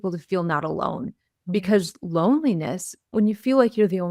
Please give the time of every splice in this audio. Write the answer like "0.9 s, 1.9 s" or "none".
3.1 s